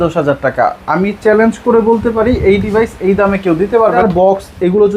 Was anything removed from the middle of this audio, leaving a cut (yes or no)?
yes